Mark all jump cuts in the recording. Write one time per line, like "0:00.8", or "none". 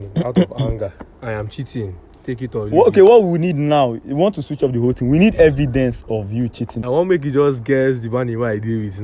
0:06.7